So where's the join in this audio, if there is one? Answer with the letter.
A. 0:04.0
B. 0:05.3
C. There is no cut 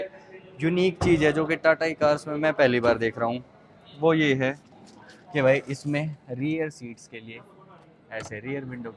C